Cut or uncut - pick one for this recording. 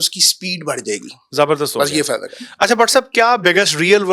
uncut